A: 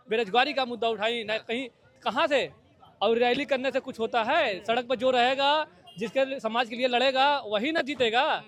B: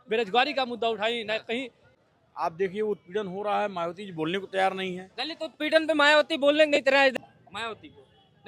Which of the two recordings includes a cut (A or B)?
B